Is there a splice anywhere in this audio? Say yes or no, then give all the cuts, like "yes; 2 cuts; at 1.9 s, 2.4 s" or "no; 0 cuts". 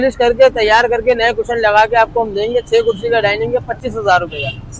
no; 0 cuts